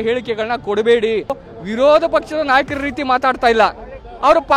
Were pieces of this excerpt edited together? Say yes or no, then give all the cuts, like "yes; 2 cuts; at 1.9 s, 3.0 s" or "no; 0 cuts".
yes; 1 cut; at 1.5 s